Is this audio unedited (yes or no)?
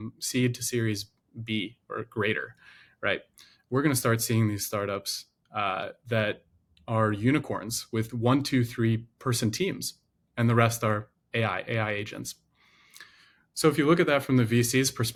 yes